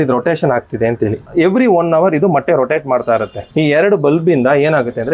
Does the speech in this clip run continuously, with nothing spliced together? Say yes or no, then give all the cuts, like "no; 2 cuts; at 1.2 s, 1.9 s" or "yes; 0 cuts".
no; 2 cuts; at 1.3 s, 3.4 s